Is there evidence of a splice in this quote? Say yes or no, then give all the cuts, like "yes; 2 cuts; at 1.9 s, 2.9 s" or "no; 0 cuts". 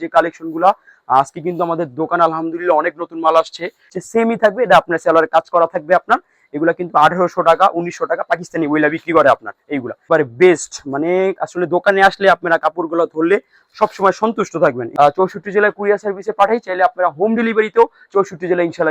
yes; 3 cuts; at 4.0 s, 10.0 s, 14.8 s